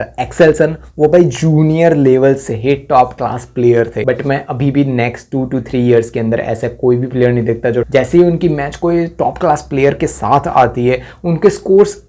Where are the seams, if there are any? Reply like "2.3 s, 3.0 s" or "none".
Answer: 4.0 s, 7.9 s